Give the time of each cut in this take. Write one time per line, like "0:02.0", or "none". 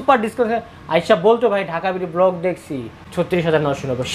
0:02.9

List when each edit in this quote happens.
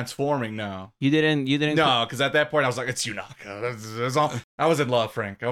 0:04.4

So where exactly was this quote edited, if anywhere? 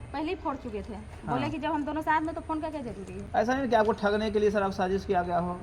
none

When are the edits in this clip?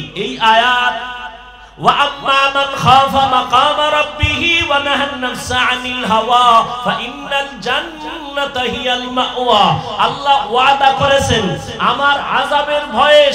none

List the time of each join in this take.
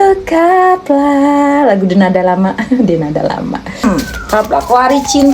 0:03.8

